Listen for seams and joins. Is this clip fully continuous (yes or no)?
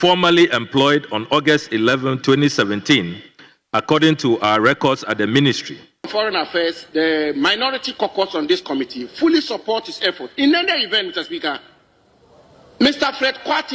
no